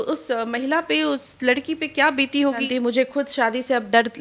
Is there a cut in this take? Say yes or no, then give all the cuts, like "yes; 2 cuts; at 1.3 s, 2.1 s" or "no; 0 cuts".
yes; 1 cut; at 2.7 s